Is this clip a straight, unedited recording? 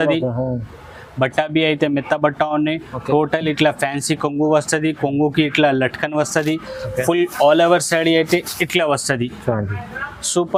yes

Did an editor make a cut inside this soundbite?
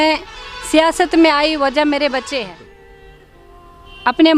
yes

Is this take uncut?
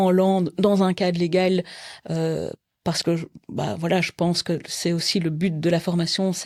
yes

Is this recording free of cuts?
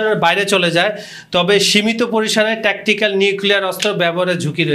yes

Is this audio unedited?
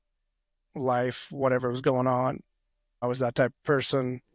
no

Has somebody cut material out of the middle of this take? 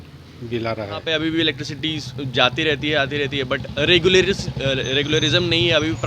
yes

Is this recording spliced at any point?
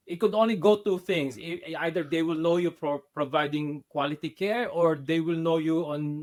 no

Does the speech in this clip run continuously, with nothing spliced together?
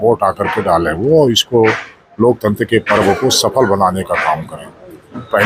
yes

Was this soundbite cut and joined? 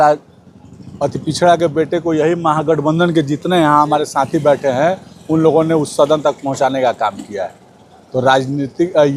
no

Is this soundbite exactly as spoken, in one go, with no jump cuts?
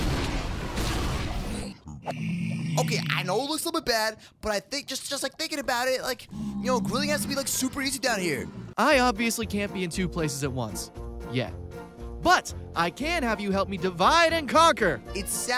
no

